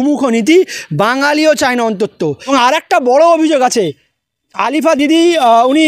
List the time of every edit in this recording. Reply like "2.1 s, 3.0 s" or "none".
2.4 s